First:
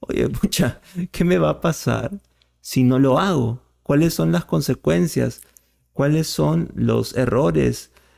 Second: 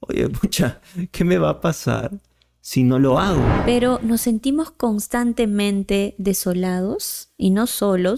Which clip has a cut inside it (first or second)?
second